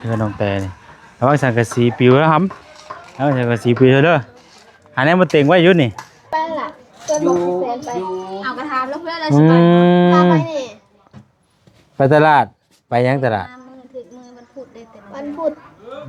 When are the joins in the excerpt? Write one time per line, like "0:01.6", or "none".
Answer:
0:06.3